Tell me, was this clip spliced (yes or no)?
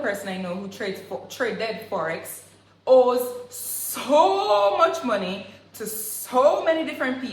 no